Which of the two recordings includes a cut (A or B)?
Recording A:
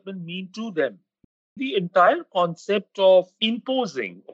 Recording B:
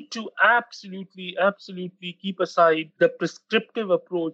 A